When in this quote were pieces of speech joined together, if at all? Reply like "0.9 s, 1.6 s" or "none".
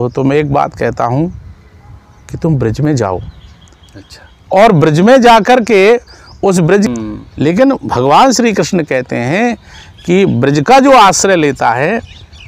6.9 s

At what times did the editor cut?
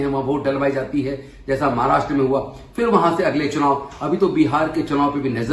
none

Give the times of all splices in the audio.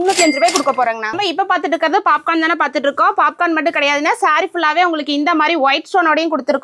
none

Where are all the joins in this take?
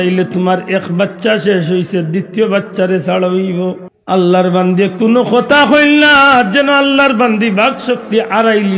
3.9 s

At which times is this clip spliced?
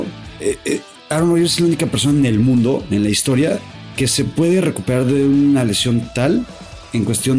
none

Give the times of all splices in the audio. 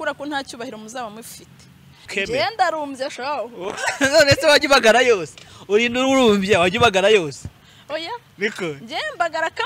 2.1 s

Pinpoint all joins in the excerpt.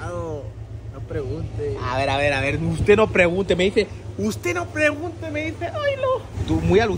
none

